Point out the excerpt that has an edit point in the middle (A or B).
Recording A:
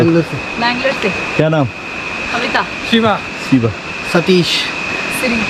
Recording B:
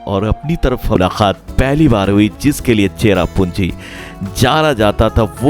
B